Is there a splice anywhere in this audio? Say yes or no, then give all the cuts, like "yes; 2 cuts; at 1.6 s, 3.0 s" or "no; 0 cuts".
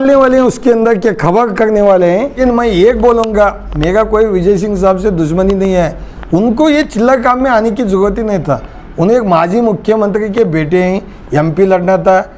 yes; 1 cut; at 2.3 s